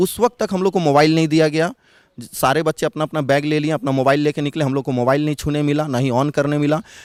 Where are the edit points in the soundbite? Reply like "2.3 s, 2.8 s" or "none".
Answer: none